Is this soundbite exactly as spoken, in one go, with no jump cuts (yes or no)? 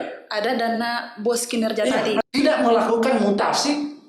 no